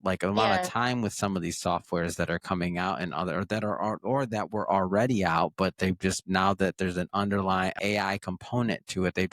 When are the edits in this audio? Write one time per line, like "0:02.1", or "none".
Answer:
0:07.8